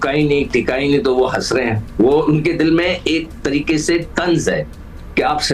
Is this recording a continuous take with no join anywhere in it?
yes; 0 cuts

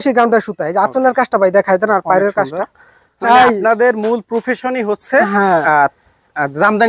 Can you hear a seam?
yes; 1 cut; at 3.2 s

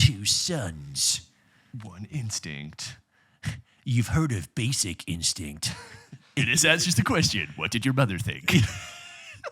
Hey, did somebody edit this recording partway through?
yes; 1 cut; at 6.4 s

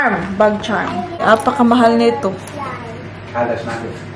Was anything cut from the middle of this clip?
yes; 1 cut; at 1.2 s

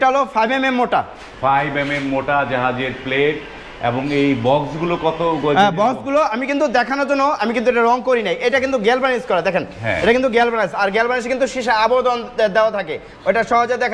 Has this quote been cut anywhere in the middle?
no; 0 cuts

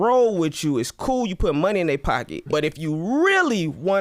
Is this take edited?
yes; 1 cut; at 2.4 s

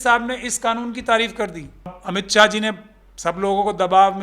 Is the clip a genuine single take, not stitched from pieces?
no; 1 cut; at 2.0 s

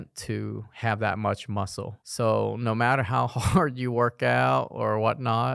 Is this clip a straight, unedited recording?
yes; 0 cuts

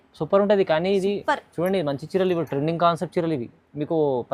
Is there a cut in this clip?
no; 0 cuts

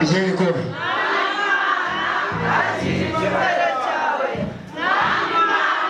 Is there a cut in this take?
no; 0 cuts

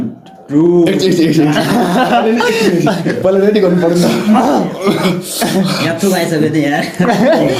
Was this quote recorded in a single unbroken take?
yes; 0 cuts

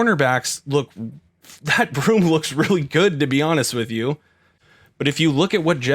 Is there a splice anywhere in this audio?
yes; 1 cut; at 4.8 s

